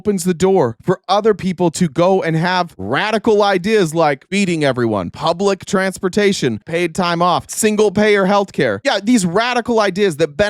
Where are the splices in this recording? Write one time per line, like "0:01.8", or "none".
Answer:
0:05.1
0:06.6
0:07.5